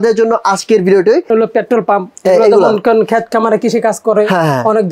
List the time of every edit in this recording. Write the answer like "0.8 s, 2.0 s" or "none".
1.3 s